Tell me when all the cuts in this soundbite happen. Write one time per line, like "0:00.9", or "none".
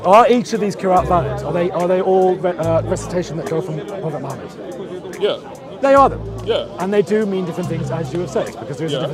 none